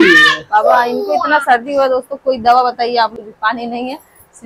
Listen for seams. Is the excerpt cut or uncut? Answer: cut